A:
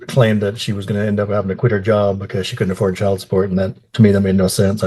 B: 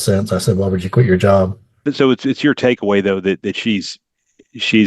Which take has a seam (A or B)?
B